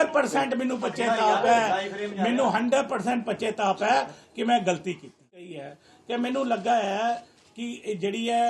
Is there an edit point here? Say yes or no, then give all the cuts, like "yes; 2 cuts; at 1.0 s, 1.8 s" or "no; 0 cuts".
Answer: yes; 1 cut; at 5.5 s